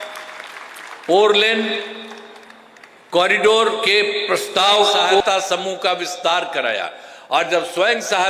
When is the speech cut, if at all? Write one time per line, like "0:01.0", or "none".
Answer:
0:05.2